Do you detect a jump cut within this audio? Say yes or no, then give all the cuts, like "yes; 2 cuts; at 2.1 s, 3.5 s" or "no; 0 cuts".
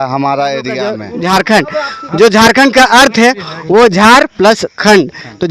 yes; 1 cut; at 1.1 s